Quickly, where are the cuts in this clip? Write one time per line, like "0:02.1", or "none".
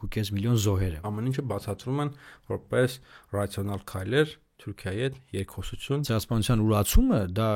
0:01.1
0:06.1